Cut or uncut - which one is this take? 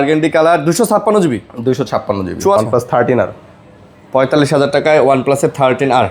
cut